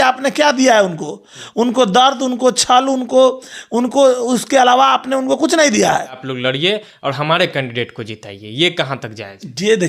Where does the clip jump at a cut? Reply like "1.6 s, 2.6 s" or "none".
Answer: 6.3 s